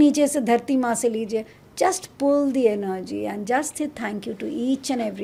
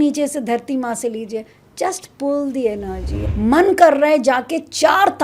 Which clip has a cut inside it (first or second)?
second